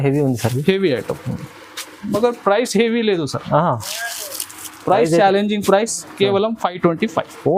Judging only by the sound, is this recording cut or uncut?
uncut